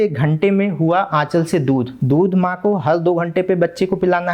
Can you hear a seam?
yes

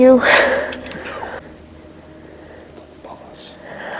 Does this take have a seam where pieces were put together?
yes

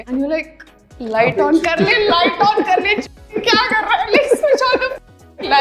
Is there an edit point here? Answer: no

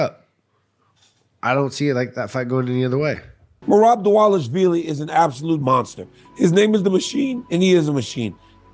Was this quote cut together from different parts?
yes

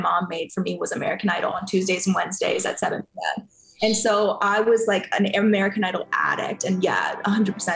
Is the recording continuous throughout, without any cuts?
yes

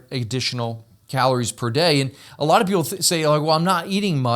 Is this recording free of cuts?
no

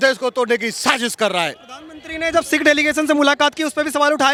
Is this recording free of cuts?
yes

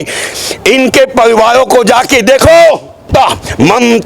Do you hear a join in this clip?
yes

